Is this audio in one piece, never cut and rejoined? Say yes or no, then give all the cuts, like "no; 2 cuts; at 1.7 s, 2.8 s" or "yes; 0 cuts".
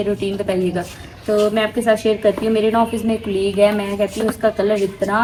yes; 0 cuts